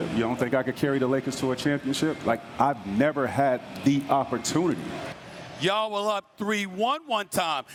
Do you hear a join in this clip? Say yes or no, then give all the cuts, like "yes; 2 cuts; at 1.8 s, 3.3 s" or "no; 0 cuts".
no; 0 cuts